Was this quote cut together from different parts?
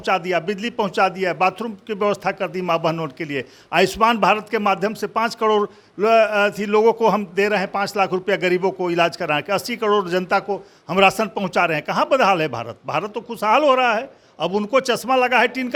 no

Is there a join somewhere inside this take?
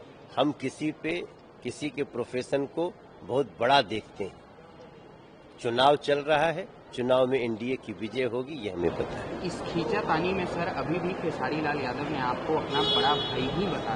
no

